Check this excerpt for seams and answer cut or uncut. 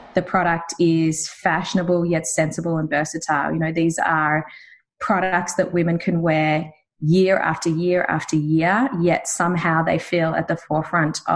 uncut